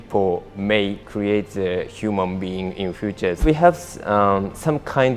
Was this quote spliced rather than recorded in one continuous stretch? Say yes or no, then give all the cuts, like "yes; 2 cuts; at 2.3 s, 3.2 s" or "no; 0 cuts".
yes; 2 cuts; at 1.0 s, 3.4 s